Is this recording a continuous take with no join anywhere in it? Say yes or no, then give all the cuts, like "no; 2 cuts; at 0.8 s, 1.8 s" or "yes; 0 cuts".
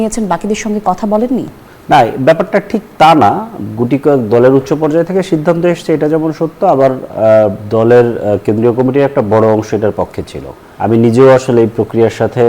no; 1 cut; at 10.6 s